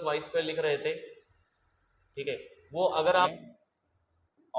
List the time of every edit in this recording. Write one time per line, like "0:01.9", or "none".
0:03.3